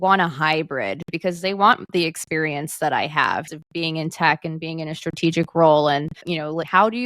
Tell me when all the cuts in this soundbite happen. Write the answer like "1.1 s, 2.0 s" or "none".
3.5 s